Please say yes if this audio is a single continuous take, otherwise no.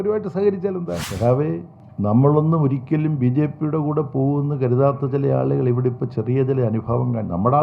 no